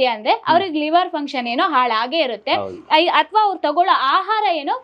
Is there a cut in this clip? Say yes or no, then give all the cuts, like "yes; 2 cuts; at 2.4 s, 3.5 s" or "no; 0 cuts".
no; 0 cuts